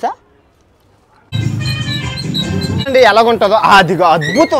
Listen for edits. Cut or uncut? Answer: cut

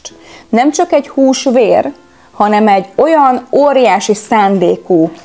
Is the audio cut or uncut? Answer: uncut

